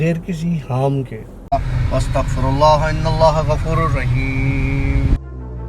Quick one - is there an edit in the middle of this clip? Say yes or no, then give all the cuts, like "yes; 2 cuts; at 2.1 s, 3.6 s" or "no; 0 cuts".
yes; 1 cut; at 1.3 s